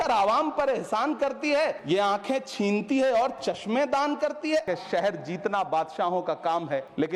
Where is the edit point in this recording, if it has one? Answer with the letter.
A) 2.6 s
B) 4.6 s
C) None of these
B